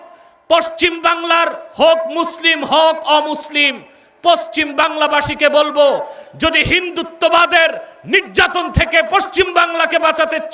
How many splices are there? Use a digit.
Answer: 0